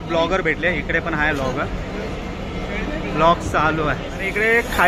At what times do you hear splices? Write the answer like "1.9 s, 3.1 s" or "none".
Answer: none